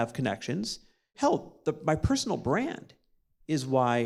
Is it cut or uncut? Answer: cut